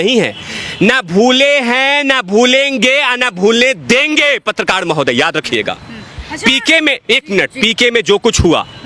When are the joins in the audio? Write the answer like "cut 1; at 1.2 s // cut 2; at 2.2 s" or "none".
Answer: none